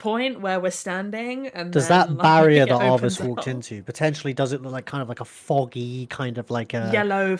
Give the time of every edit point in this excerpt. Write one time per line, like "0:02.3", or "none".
none